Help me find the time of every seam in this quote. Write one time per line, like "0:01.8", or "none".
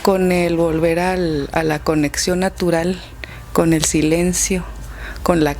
none